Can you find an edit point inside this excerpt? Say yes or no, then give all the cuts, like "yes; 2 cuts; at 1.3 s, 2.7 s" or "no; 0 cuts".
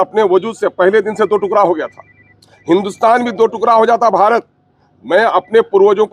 no; 0 cuts